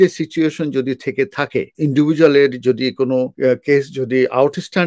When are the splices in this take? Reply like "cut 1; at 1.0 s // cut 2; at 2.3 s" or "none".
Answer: cut 1; at 1.7 s // cut 2; at 3.3 s